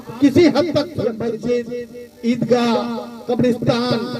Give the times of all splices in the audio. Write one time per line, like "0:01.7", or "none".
0:01.2

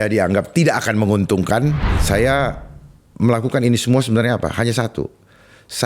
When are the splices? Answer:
0:01.9

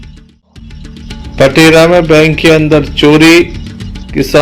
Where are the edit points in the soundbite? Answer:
0:00.9

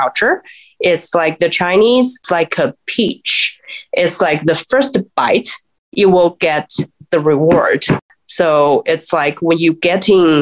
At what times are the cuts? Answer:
0:02.2
0:08.1

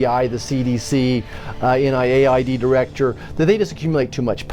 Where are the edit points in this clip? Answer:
none

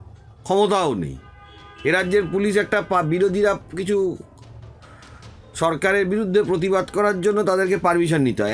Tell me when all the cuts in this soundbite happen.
none

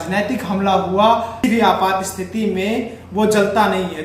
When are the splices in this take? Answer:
0:01.4

